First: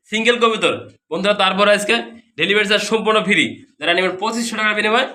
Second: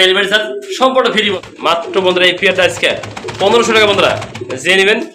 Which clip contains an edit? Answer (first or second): second